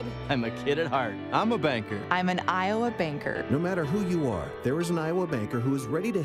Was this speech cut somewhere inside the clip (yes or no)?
no